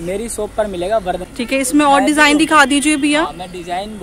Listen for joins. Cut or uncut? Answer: cut